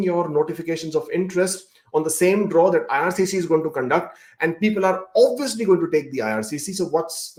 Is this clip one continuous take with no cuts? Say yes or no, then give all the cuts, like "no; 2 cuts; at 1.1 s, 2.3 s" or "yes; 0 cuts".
yes; 0 cuts